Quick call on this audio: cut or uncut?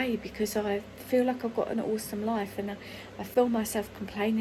uncut